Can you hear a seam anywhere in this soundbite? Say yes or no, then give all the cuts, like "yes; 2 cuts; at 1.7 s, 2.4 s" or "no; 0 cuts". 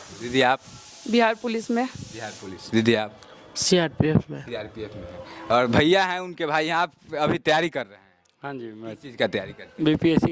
no; 0 cuts